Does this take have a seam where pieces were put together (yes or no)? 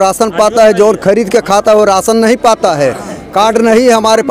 no